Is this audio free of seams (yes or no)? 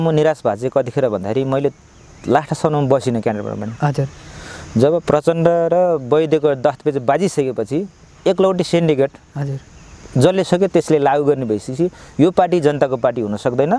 yes